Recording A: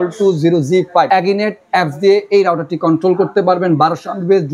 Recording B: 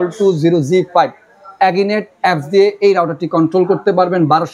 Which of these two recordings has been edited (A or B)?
A